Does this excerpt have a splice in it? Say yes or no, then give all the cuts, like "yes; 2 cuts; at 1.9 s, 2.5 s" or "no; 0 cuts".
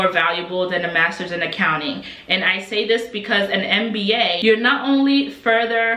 no; 0 cuts